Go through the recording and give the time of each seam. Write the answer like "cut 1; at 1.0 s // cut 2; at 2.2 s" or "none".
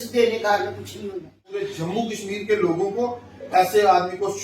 cut 1; at 1.7 s